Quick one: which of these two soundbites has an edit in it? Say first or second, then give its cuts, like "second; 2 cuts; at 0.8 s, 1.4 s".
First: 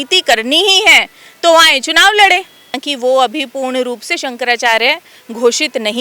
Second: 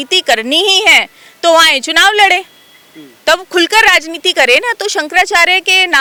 first; 1 cut; at 2.9 s